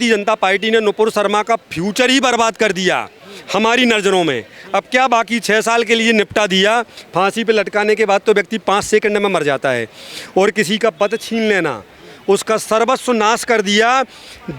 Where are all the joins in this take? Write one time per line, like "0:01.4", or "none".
0:07.0